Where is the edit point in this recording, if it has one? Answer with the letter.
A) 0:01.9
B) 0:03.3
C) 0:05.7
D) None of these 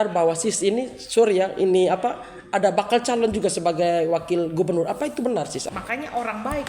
C